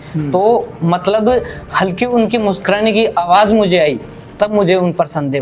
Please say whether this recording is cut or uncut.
uncut